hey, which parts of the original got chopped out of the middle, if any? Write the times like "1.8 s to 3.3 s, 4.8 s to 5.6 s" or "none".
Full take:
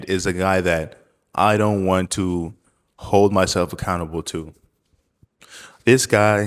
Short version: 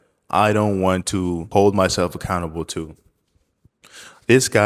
2.5 s to 3.0 s